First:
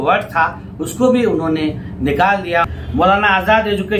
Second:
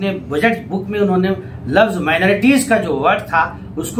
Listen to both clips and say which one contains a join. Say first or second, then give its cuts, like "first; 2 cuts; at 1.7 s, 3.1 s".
first; 1 cut; at 2.6 s